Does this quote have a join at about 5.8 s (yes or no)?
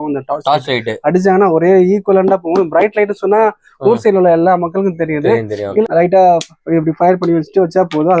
yes